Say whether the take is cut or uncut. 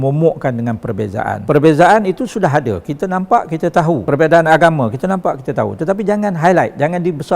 cut